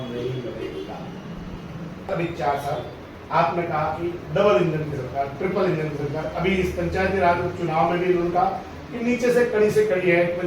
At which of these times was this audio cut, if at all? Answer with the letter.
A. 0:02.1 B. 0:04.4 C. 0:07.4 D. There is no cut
A